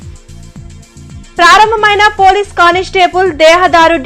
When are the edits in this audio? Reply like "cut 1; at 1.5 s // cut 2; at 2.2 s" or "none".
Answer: cut 1; at 1.2 s